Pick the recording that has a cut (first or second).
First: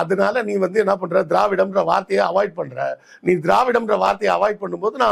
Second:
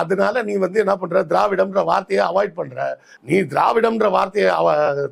second